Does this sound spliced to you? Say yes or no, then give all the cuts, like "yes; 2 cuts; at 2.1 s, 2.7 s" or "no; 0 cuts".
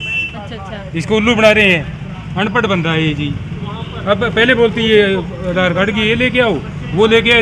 no; 0 cuts